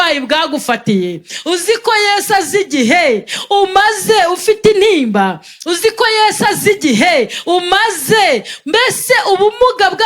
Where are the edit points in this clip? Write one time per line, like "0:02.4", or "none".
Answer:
none